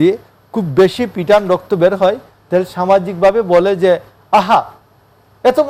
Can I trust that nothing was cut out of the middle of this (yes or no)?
yes